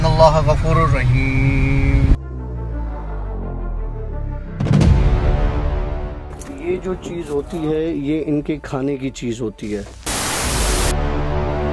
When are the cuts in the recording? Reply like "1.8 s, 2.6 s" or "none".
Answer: none